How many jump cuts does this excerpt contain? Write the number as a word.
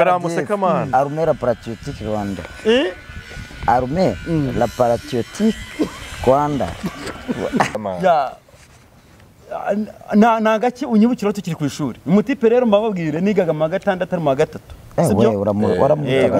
one